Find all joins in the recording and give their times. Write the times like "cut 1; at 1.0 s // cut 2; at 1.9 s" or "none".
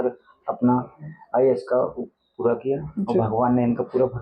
none